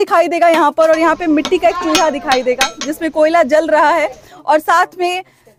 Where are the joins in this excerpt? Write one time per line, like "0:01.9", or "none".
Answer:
none